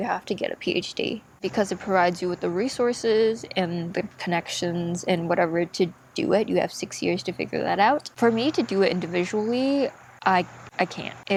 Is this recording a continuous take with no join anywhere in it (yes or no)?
yes